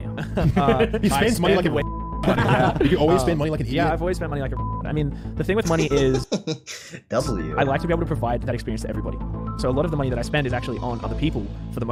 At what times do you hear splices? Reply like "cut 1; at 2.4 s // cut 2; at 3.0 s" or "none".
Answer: none